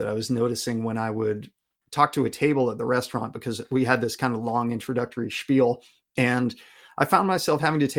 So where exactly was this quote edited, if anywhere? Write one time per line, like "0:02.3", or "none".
0:06.1